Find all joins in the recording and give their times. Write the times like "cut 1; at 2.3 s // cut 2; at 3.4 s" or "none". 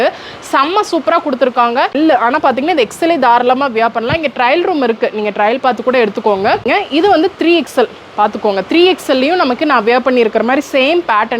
cut 1; at 2.0 s // cut 2; at 6.6 s

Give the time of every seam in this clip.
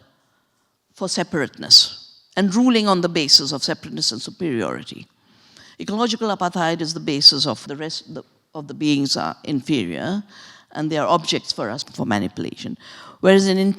cut 1; at 7.7 s // cut 2; at 11.9 s

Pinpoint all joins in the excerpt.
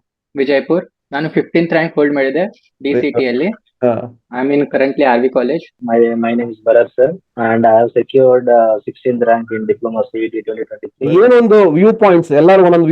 cut 1; at 4.2 s // cut 2; at 5.8 s // cut 3; at 7.3 s // cut 4; at 10.9 s

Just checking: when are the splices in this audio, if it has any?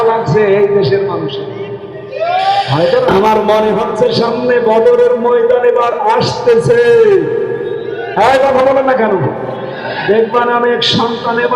cut 1; at 3.1 s

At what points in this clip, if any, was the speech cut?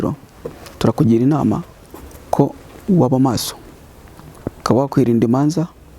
cut 1; at 4.6 s

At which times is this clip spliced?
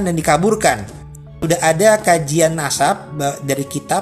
cut 1; at 1.3 s

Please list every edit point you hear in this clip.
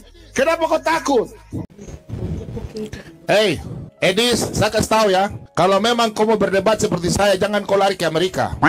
cut 1; at 1.7 s

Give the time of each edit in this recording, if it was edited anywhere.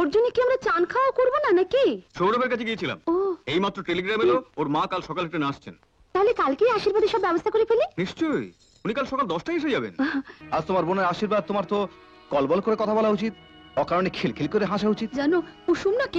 cut 1; at 2.1 s // cut 2; at 10.4 s

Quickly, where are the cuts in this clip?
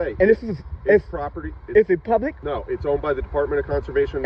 cut 1; at 2.4 s

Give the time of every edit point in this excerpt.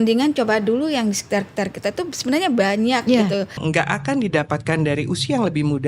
cut 1; at 3.6 s

